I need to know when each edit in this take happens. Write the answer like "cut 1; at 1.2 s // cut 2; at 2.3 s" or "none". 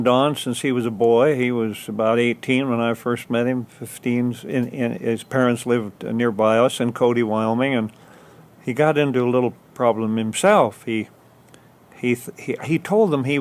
cut 1; at 4.1 s